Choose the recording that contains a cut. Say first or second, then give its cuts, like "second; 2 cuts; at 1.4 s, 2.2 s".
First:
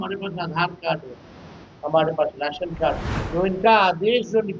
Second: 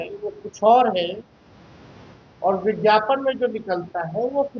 first; 1 cut; at 3.1 s